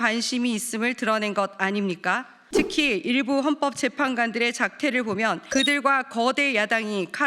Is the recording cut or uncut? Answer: cut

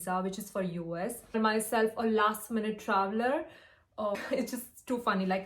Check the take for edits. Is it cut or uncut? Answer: cut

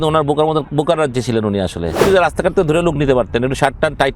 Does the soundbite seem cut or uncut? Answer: cut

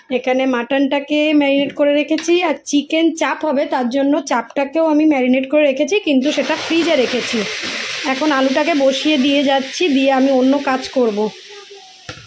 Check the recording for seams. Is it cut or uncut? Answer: uncut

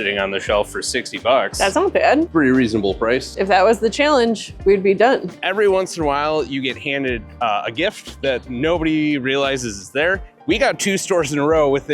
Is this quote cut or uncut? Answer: cut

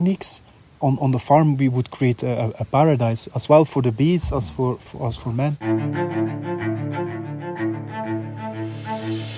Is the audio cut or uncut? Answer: cut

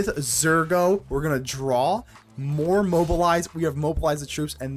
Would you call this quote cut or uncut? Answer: uncut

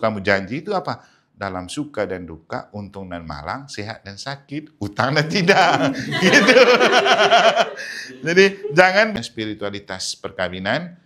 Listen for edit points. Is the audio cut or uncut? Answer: cut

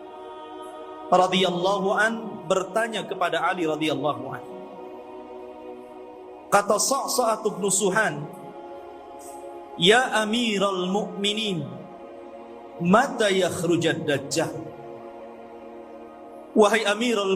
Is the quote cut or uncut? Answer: cut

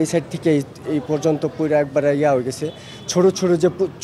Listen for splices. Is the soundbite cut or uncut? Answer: uncut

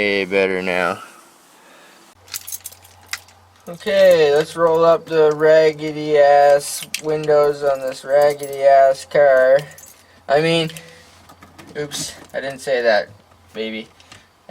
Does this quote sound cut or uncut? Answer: cut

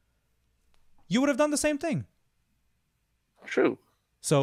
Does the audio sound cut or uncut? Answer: uncut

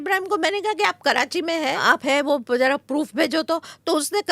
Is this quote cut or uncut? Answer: cut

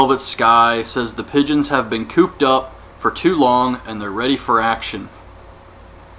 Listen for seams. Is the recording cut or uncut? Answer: cut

